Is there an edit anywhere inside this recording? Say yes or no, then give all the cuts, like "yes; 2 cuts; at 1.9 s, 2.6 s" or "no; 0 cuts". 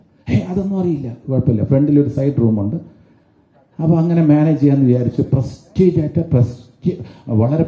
no; 0 cuts